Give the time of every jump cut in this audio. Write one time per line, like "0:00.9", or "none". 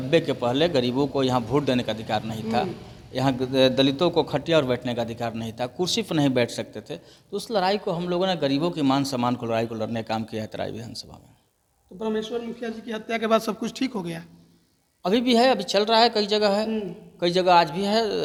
none